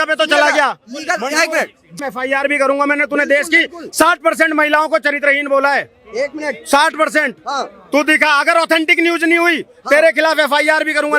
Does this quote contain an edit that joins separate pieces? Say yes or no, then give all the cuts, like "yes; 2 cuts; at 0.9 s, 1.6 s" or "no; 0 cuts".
yes; 1 cut; at 2.0 s